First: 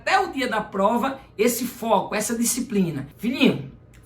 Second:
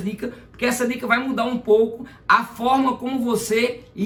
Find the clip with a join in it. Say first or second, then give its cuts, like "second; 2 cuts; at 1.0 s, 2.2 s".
first; 1 cut; at 3.1 s